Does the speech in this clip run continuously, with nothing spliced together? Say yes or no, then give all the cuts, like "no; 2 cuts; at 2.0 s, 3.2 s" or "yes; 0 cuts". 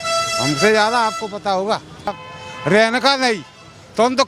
no; 1 cut; at 2.2 s